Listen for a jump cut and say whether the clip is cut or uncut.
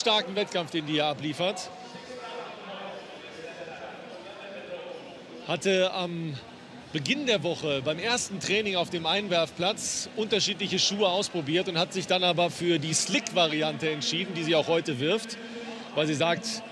cut